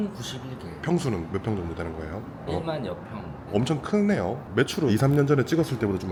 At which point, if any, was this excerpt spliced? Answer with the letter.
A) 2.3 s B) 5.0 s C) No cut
C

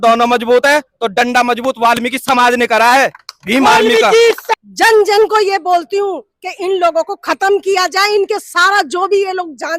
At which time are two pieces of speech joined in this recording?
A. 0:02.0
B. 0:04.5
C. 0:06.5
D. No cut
B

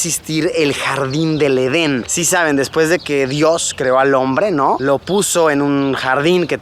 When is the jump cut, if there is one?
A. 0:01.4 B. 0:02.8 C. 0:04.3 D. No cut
D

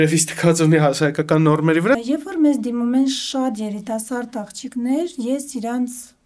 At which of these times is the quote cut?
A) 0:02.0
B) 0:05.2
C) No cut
A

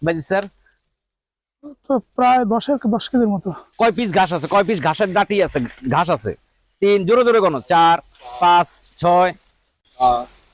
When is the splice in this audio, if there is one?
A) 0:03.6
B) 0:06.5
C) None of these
A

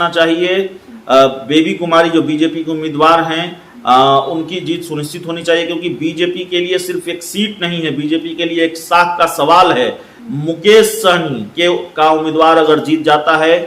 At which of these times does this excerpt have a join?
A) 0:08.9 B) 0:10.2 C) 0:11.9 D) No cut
D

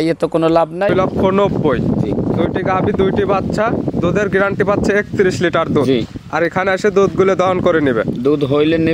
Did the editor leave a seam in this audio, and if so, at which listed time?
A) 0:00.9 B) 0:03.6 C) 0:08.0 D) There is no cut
A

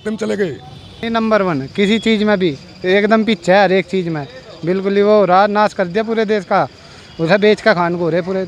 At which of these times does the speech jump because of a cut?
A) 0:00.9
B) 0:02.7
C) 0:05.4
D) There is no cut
A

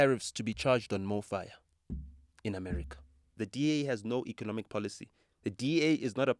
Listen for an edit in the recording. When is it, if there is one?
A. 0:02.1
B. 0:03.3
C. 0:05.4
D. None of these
B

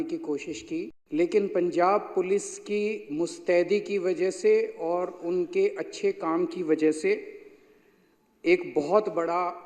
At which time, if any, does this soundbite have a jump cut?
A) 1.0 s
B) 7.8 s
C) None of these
A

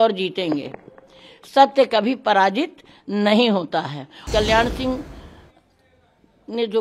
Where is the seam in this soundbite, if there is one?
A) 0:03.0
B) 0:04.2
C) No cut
B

